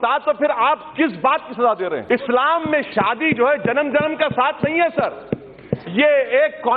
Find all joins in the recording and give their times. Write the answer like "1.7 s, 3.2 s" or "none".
2.0 s